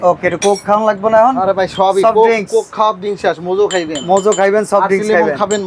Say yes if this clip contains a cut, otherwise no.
no